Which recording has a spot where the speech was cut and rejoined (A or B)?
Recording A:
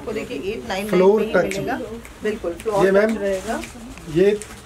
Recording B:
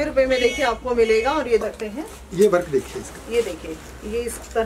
B